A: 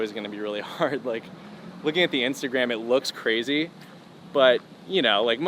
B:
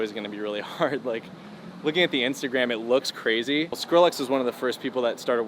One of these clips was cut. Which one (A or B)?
B